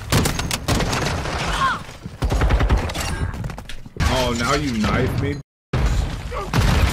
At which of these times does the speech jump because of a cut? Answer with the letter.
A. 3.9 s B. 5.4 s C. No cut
A